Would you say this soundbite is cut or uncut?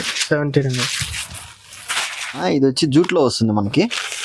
cut